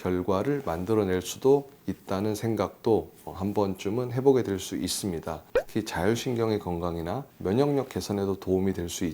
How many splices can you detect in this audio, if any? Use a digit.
1